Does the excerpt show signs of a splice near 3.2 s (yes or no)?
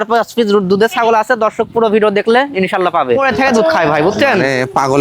yes